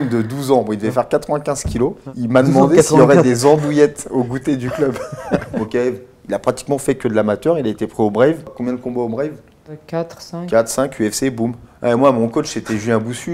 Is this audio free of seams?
no; 5 cuts; at 2.1 s, 5.6 s, 8.5 s, 9.8 s, 11.7 s

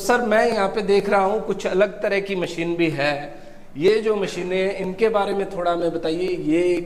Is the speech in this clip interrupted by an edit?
no; 0 cuts

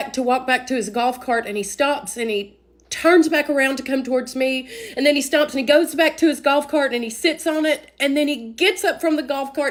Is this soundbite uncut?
yes; 0 cuts

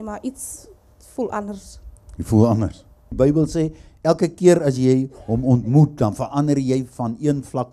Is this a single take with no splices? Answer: no; 1 cut; at 3.1 s

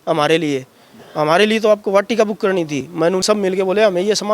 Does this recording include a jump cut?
yes; 1 cut; at 3.2 s

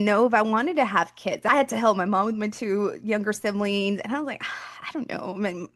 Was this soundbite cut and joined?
yes; 1 cut; at 1.4 s

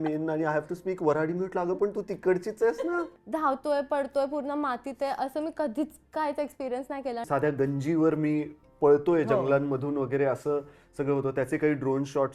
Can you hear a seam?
yes; 2 cuts; at 3.0 s, 7.2 s

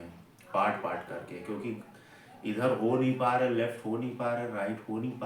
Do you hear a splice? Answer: no; 0 cuts

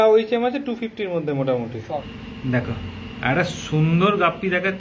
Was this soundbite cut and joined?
yes; 1 cut; at 2.0 s

